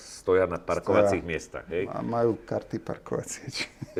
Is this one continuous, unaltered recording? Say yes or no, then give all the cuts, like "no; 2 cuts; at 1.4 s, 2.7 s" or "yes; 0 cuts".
yes; 0 cuts